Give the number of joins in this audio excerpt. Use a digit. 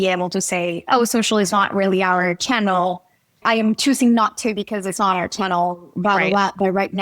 1